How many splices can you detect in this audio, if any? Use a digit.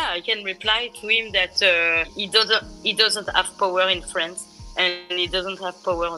1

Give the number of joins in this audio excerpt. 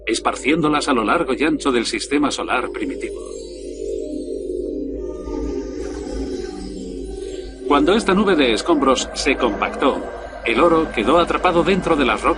0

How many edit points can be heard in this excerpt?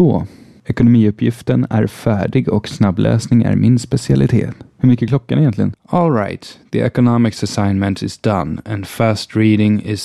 0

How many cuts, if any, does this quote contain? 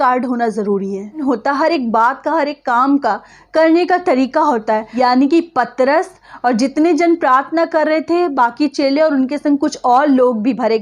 2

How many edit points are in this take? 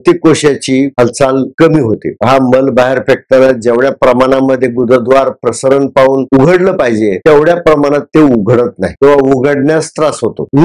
2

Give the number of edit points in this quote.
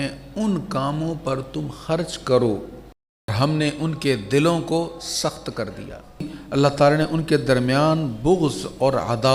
2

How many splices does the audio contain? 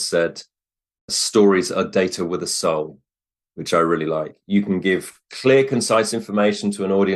1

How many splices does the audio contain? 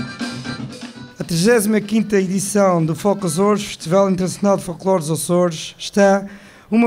1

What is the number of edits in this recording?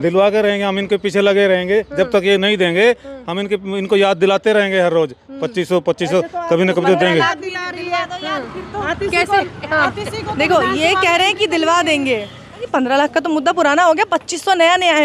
1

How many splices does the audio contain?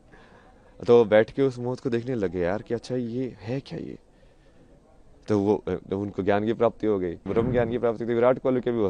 1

